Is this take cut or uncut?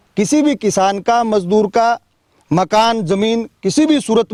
uncut